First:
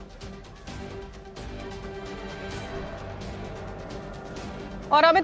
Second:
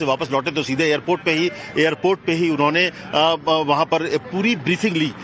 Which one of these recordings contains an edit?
second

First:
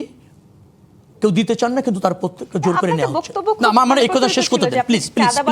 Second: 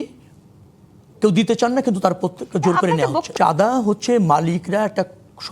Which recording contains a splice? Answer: second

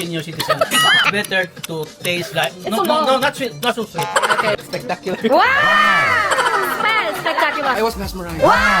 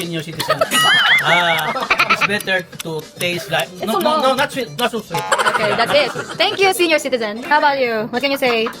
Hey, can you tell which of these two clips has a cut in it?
first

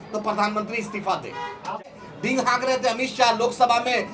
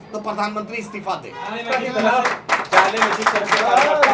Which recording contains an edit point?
first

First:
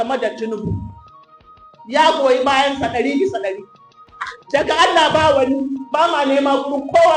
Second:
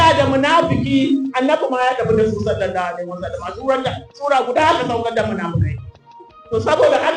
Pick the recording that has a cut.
first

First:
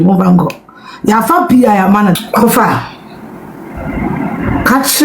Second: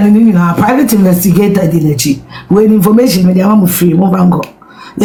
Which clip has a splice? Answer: first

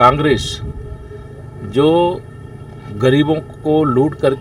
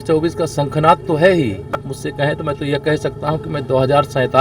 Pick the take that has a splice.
second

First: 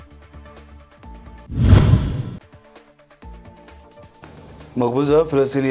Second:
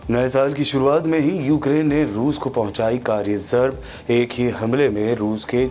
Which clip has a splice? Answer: first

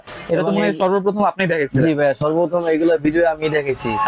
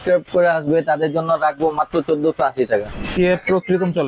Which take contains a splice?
second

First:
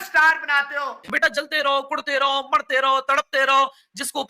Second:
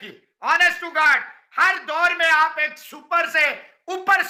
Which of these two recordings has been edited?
first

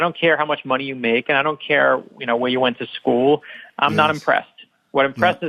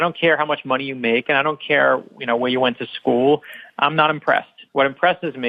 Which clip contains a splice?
second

